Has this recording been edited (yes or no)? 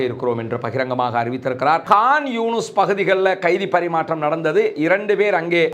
yes